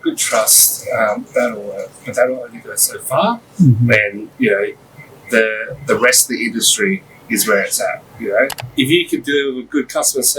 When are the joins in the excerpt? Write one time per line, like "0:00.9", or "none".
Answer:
0:08.6